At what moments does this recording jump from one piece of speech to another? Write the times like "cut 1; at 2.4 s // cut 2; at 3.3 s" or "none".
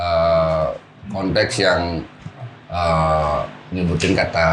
none